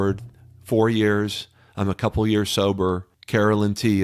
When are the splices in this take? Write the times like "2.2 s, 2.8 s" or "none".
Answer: 3.1 s